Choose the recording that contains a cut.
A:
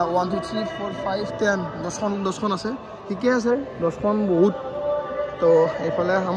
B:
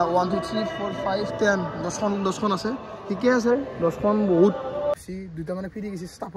B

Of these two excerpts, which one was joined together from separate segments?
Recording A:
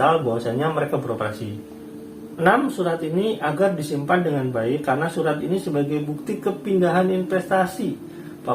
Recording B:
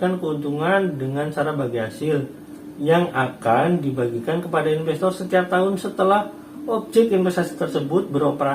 A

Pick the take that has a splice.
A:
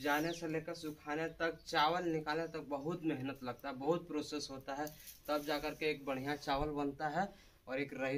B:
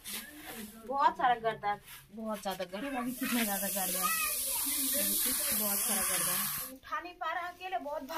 B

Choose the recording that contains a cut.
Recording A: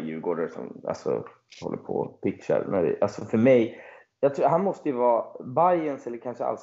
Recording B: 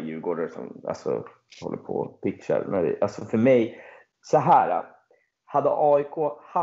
A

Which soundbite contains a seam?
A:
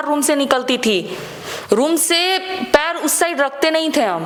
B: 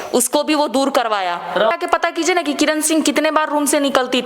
B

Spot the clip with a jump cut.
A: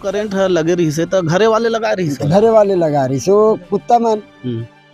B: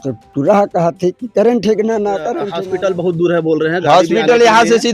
B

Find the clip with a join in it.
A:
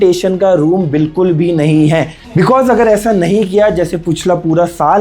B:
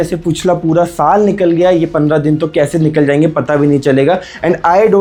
A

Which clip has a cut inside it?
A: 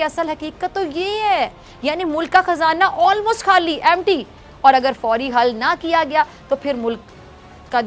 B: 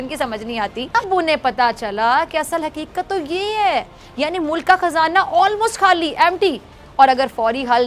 B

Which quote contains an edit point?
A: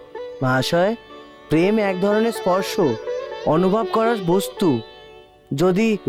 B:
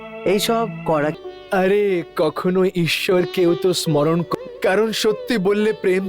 B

